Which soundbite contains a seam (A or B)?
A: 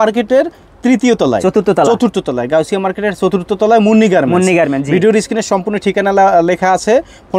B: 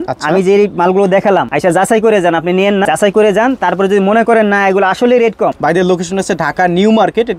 B